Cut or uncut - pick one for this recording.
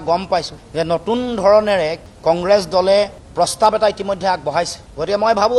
uncut